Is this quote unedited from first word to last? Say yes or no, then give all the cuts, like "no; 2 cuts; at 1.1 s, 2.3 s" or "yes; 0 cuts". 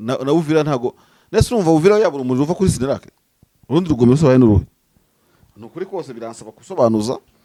yes; 0 cuts